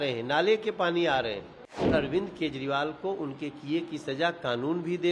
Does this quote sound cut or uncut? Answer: cut